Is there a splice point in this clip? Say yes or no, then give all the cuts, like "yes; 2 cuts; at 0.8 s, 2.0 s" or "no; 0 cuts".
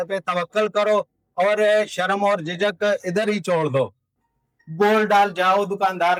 no; 0 cuts